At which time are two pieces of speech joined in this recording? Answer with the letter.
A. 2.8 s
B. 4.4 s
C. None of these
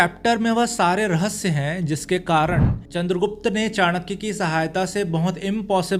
A